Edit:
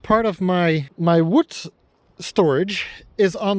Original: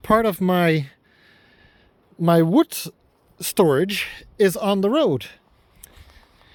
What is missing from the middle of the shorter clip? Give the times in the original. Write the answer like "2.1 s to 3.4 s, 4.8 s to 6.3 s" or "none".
0.9 s to 2.1 s